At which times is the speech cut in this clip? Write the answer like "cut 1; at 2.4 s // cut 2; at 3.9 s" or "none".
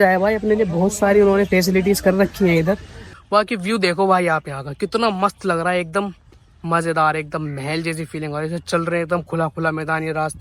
cut 1; at 3.2 s